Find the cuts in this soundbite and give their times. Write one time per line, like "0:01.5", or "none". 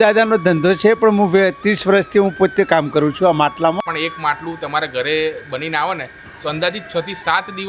0:03.8